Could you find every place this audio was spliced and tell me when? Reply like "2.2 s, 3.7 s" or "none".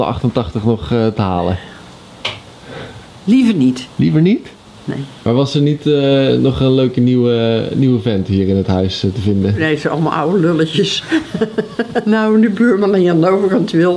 5.1 s, 9.6 s, 12.0 s

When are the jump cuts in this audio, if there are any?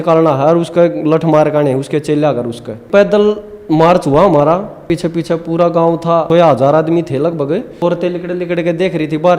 2.9 s, 4.9 s, 6.3 s, 7.8 s

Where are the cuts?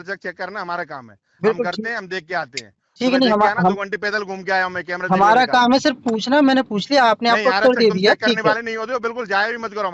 none

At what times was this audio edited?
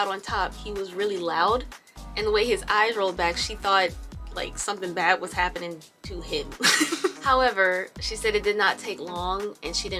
7.2 s

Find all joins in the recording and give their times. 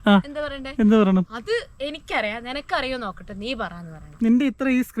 4.0 s

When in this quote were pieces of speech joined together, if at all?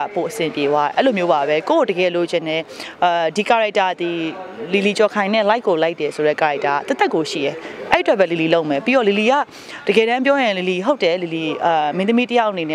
none

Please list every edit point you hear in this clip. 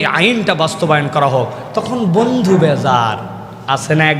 none

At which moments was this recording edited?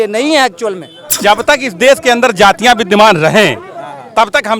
1.0 s

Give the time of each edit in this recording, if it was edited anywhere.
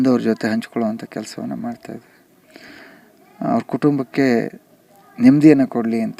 none

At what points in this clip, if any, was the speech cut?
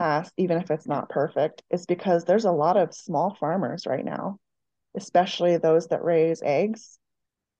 none

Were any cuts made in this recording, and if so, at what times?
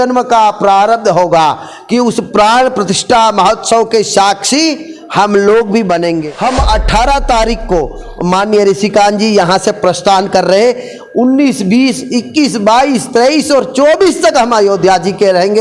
6.3 s

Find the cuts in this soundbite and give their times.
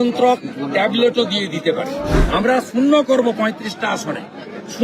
2.1 s

